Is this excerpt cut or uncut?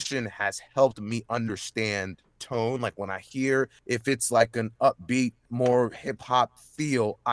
cut